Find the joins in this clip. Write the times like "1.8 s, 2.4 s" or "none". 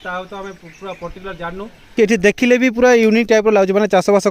1.9 s